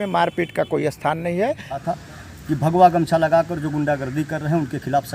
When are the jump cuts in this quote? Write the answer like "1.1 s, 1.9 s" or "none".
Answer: 1.8 s